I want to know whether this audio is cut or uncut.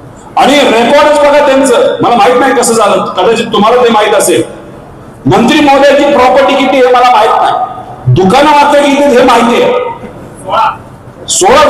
uncut